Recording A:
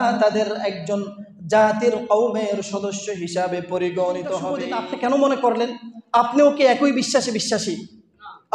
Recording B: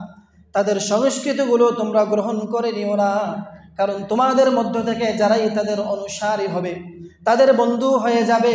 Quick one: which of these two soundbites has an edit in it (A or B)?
A